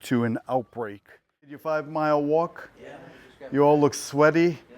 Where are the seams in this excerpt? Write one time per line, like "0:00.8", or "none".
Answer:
0:01.6